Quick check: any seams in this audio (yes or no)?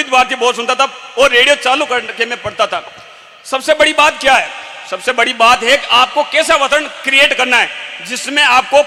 no